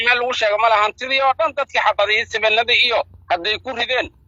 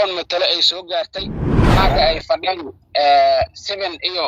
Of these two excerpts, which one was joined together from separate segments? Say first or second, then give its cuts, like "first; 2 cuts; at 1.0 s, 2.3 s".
second; 1 cut; at 1.7 s